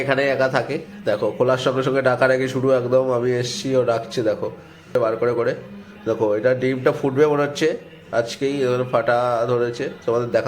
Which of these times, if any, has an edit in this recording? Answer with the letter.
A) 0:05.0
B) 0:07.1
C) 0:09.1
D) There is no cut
A